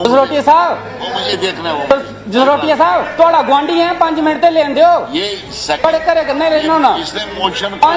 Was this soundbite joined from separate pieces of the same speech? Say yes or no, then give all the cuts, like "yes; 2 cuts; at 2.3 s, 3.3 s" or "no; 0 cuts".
no; 0 cuts